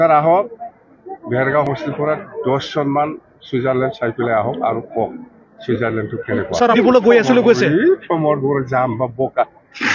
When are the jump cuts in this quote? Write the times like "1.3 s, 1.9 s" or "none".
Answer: 1.7 s, 6.8 s